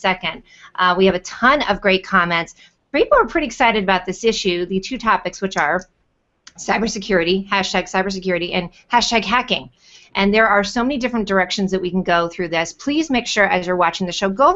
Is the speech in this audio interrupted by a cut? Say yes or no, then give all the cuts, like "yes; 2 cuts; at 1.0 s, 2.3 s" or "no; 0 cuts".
no; 0 cuts